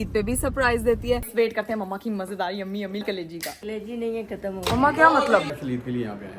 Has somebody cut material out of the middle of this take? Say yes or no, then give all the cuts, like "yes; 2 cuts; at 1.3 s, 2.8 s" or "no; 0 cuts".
yes; 3 cuts; at 1.2 s, 3.0 s, 5.5 s